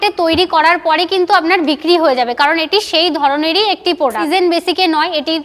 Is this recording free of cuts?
no; 1 cut; at 4.3 s

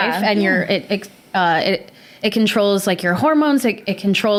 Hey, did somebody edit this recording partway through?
no; 0 cuts

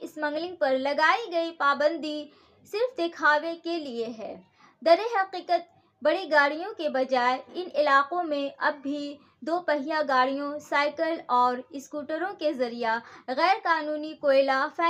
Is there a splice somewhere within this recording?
no; 0 cuts

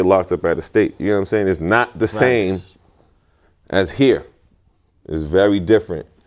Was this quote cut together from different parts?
no; 0 cuts

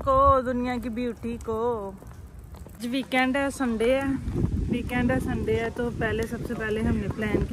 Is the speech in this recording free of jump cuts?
yes; 0 cuts

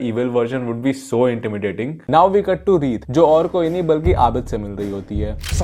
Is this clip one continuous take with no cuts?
no; 1 cut; at 2.0 s

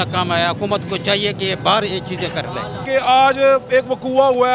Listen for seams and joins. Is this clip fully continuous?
no; 1 cut; at 2.8 s

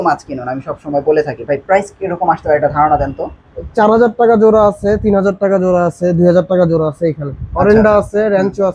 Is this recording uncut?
yes; 0 cuts

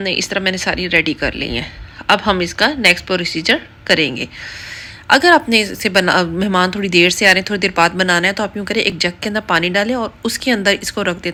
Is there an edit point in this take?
no; 0 cuts

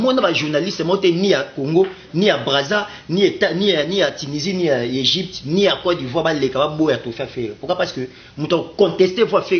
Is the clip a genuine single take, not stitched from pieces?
yes; 0 cuts

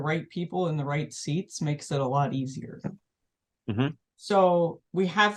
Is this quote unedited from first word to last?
yes; 0 cuts

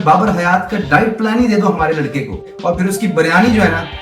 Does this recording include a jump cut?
yes; 1 cut; at 2.5 s

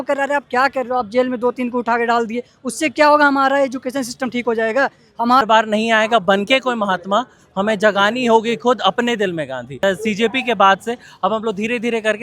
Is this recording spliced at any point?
yes; 2 cuts; at 5.4 s, 9.8 s

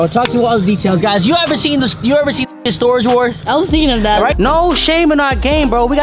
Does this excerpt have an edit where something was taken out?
yes; 1 cut; at 4.3 s

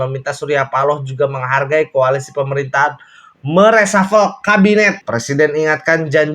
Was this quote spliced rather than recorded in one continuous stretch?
yes; 1 cut; at 5.0 s

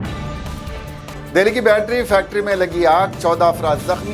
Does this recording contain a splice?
no; 0 cuts

